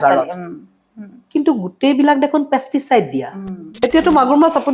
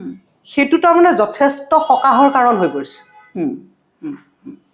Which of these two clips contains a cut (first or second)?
first